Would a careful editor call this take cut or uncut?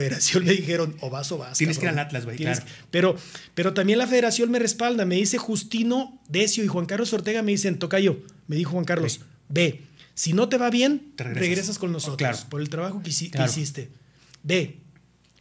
uncut